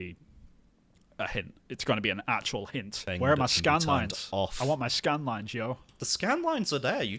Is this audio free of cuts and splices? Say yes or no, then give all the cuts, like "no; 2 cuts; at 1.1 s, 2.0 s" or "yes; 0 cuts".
no; 1 cut; at 3.0 s